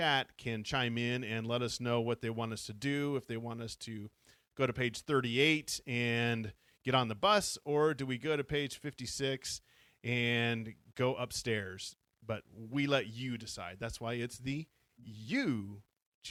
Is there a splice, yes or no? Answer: no